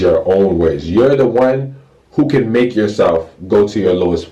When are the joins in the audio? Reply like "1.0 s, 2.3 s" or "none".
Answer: none